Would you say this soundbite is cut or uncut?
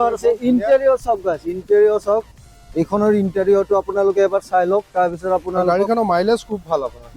uncut